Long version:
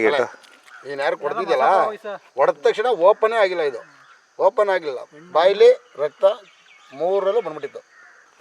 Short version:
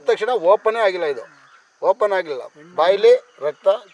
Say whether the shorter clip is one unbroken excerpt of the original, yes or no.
yes